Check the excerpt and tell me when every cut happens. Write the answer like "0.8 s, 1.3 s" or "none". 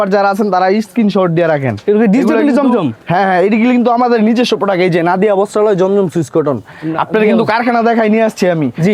none

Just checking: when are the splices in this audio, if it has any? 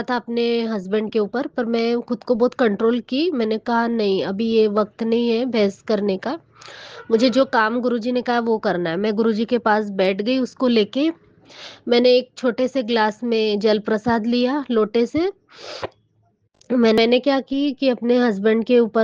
17.0 s

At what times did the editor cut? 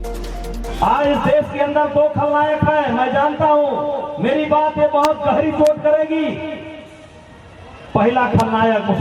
1.1 s

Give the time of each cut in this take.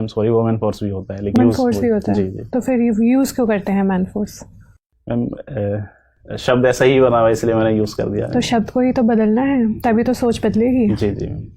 1.3 s

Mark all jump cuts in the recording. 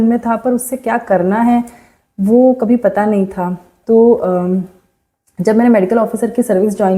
none

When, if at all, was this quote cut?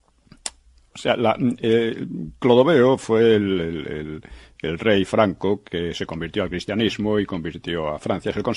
2.1 s

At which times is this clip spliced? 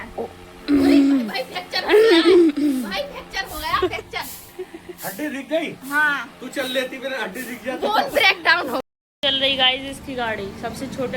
8.8 s

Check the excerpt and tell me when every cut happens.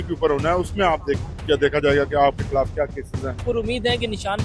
3.3 s

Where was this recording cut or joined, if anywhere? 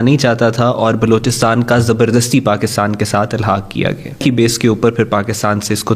4.2 s

